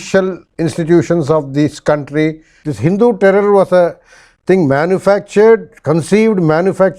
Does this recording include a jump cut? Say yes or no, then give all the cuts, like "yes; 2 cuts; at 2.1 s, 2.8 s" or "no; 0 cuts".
yes; 1 cut; at 2.6 s